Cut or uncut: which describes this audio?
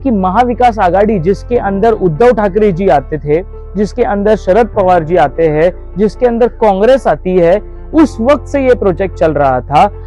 uncut